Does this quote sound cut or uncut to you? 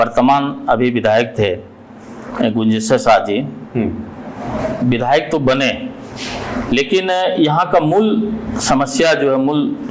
uncut